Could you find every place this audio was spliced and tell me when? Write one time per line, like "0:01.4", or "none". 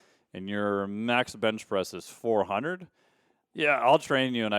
none